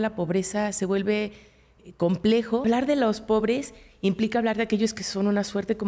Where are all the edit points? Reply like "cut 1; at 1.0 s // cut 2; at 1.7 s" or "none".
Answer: cut 1; at 2.6 s

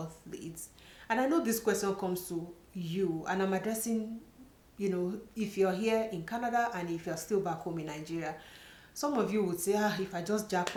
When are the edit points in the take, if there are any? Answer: none

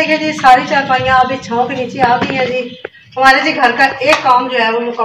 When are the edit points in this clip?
none

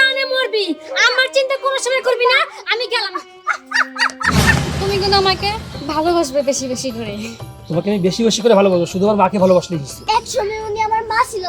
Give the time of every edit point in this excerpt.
cut 1; at 4.7 s // cut 2; at 9.9 s

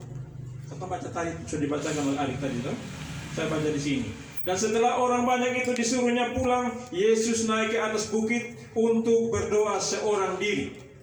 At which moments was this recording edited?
none

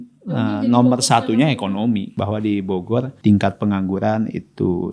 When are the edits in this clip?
cut 1; at 2.1 s // cut 2; at 3.1 s

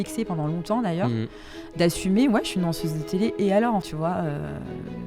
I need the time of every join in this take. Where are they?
cut 1; at 3.9 s

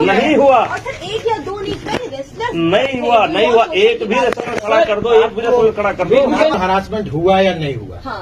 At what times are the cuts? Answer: cut 1; at 6.6 s

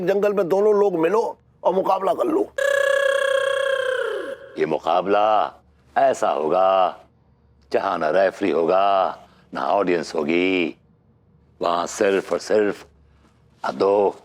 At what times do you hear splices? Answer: cut 1; at 4.4 s

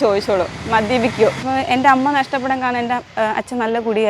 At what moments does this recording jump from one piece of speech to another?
cut 1; at 1.4 s // cut 2; at 3.1 s

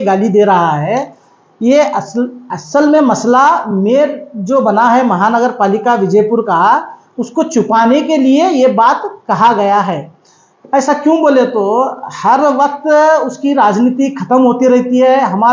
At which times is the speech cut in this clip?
none

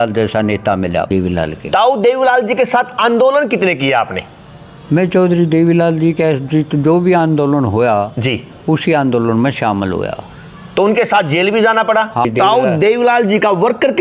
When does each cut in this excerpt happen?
cut 1; at 1.1 s // cut 2; at 12.2 s

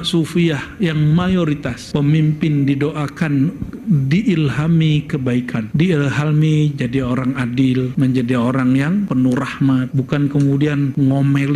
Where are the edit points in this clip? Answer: none

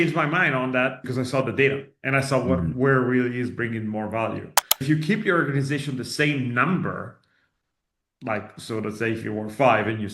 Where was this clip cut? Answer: cut 1; at 1.0 s // cut 2; at 4.8 s

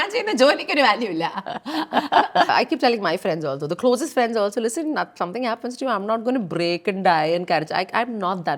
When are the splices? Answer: cut 1; at 2.5 s

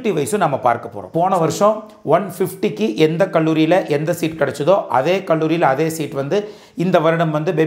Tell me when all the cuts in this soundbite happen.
cut 1; at 1.1 s

